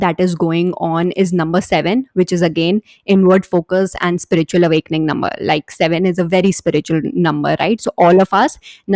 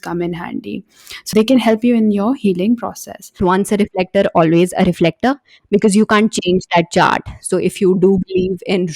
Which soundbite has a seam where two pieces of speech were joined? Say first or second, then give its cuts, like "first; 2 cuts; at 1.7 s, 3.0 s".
second; 2 cuts; at 1.3 s, 3.4 s